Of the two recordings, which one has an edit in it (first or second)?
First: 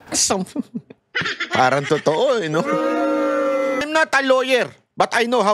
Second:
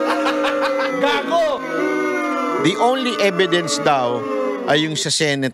first